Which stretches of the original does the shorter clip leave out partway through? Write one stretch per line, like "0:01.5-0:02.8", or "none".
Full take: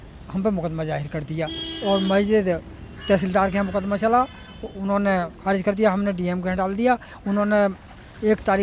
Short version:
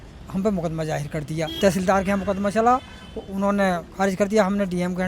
0:01.5-0:03.0